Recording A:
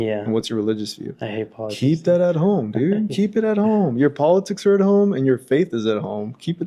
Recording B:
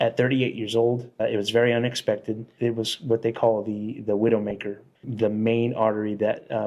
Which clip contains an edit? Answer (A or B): B